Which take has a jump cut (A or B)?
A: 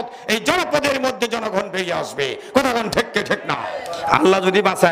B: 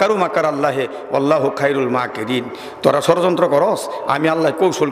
A